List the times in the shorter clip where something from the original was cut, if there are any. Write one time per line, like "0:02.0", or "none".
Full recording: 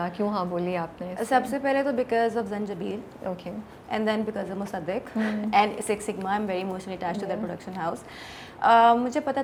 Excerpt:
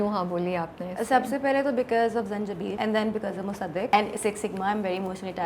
0:02.8
0:03.9